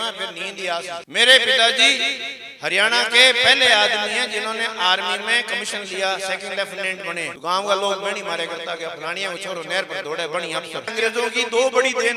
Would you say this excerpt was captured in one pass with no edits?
no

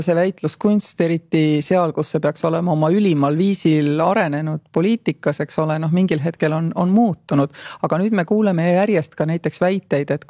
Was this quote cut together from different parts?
no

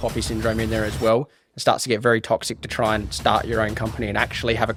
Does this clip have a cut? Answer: no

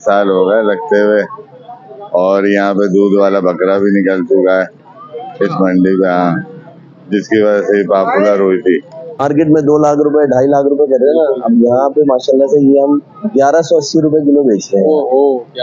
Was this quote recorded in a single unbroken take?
no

